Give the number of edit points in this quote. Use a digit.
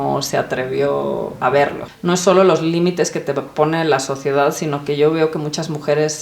1